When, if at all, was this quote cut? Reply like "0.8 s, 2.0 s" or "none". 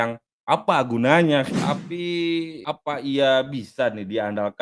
1.5 s